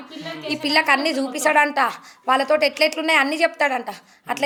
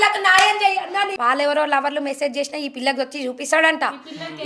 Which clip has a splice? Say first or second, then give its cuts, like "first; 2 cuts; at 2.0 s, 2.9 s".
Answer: second; 1 cut; at 1.1 s